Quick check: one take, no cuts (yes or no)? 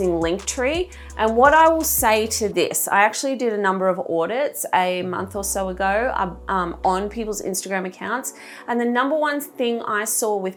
yes